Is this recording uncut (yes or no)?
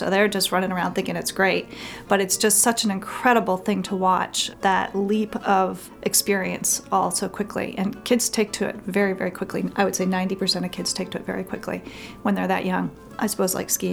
no